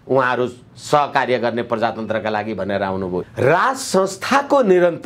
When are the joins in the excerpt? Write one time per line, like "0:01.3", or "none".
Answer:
0:03.2